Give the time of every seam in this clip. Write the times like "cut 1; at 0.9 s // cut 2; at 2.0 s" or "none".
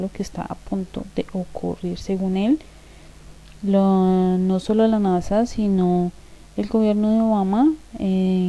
cut 1; at 1.4 s